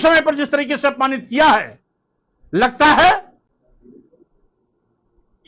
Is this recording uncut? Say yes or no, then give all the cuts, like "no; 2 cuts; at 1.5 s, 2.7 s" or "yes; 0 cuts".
yes; 0 cuts